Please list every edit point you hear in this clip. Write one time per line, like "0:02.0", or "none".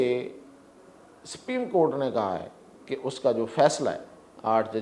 none